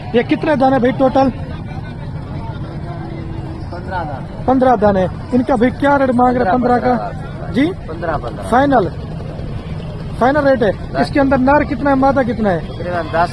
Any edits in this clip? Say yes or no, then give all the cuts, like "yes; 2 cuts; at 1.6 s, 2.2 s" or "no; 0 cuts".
no; 0 cuts